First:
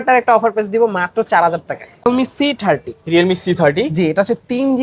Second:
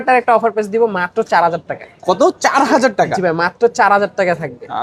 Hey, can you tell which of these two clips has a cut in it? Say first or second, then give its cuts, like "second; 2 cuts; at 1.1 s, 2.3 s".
first; 1 cut; at 2.1 s